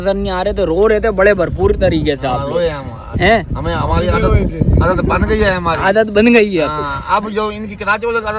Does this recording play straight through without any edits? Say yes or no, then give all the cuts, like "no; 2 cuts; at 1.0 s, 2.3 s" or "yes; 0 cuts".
yes; 0 cuts